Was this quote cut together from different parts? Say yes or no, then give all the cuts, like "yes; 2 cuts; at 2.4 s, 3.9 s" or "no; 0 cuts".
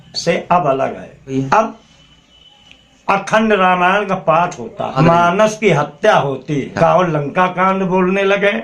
yes; 3 cuts; at 1.3 s, 5.0 s, 6.7 s